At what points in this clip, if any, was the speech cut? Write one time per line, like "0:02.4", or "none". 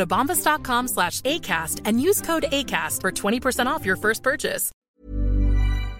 0:04.7